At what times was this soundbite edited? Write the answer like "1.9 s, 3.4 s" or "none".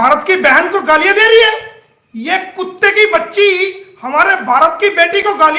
none